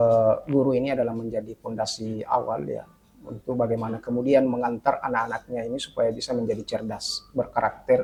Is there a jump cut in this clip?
no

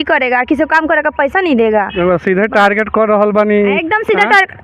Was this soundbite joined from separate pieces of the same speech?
no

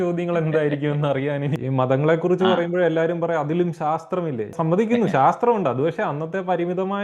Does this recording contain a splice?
yes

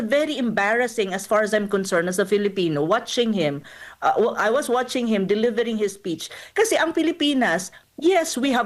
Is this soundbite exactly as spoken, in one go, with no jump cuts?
yes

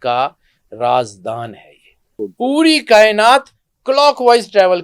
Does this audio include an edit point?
yes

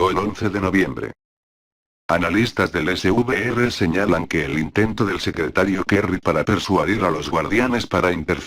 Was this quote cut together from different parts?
yes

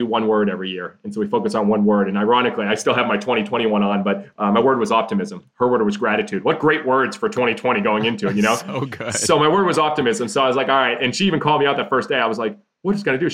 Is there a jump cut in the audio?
no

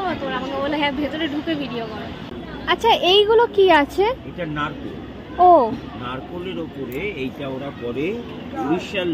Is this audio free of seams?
no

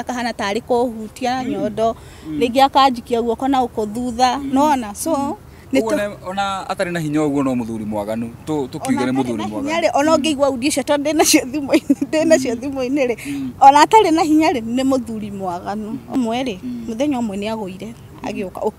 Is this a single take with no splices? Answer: no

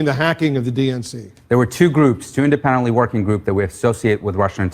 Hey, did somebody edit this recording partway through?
no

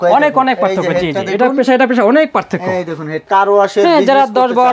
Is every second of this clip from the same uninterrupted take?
no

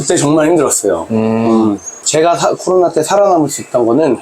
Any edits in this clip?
yes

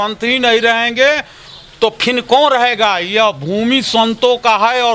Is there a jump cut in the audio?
no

